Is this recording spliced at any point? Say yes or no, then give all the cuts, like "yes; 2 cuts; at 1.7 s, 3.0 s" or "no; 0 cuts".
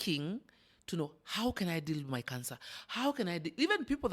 no; 0 cuts